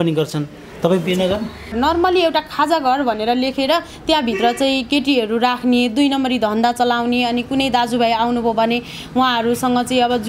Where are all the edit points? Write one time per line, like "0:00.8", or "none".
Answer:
0:01.7